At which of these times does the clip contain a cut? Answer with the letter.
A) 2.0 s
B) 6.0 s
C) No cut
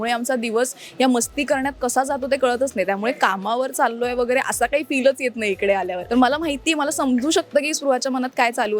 B